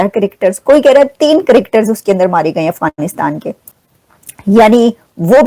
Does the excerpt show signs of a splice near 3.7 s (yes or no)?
yes